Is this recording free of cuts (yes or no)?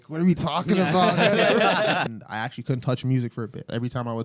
no